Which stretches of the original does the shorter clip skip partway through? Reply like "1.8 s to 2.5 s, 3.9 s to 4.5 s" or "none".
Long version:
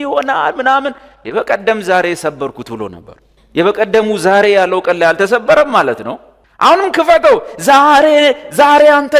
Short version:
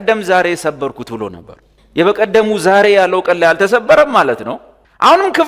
none